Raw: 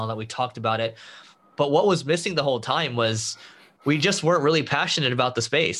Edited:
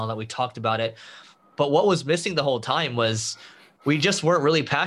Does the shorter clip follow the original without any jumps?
yes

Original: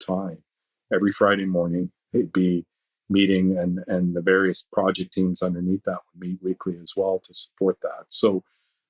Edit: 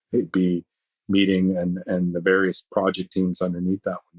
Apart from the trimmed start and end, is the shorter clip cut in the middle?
no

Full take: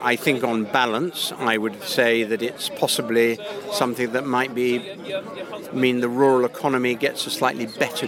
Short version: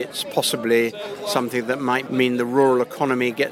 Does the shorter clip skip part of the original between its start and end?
yes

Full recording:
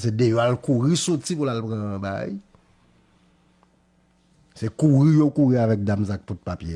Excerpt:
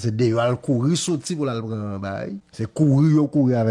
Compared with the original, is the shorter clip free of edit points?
no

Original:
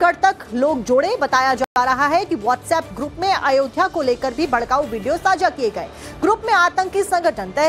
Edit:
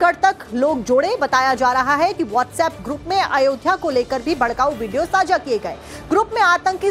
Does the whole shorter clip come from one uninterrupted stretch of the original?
no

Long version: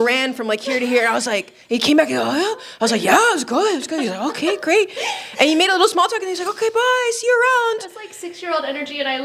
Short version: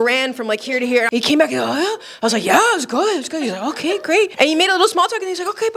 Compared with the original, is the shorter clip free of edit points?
no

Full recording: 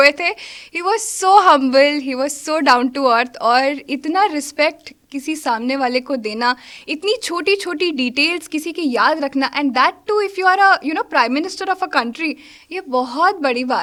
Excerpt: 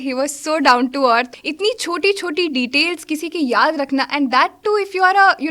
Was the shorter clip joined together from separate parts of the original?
yes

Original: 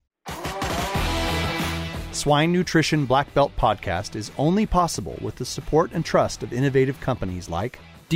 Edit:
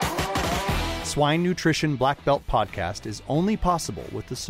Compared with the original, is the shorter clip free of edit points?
no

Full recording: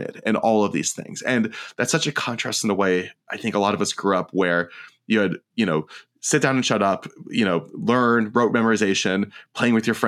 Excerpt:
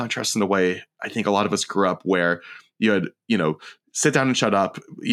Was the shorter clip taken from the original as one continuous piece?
yes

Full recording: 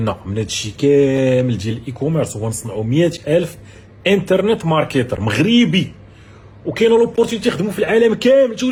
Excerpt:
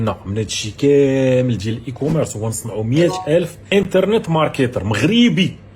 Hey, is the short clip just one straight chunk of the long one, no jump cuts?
no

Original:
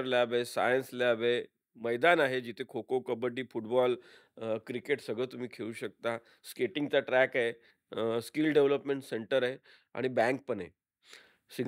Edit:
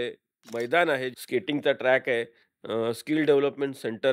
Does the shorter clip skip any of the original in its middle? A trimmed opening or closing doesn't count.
yes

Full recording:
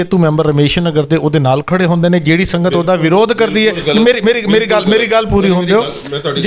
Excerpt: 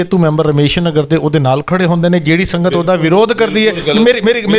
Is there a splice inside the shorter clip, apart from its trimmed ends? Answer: no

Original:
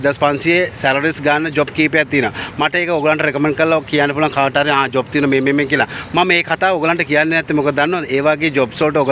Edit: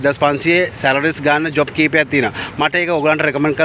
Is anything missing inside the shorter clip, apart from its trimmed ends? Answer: no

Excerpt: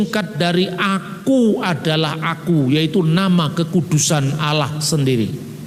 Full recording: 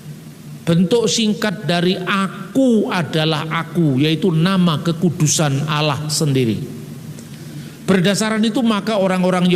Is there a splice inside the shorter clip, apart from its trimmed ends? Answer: no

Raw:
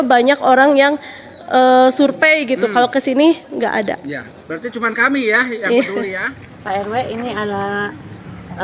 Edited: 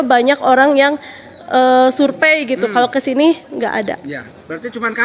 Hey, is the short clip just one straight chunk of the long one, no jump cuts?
yes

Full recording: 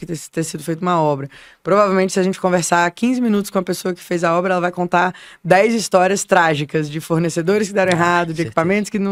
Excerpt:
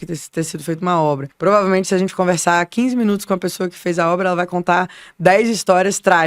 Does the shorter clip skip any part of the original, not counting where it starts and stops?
yes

